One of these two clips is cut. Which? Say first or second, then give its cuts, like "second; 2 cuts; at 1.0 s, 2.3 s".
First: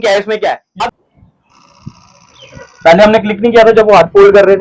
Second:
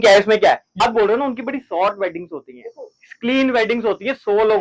first; 1 cut; at 0.9 s